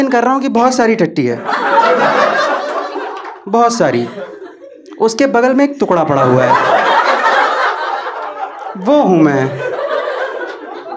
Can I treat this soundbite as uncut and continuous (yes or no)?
yes